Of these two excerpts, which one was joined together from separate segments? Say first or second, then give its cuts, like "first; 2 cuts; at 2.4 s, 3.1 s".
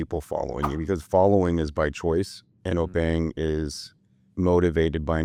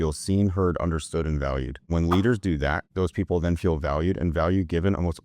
second; 2 cuts; at 1.9 s, 2.8 s